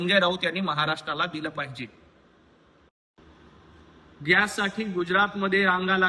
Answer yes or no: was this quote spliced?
yes